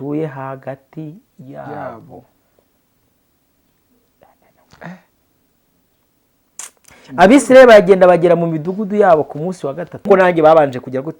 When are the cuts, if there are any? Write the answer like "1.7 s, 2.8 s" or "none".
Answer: 10.0 s